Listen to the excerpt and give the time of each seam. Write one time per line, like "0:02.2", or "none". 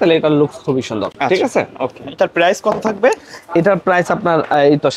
none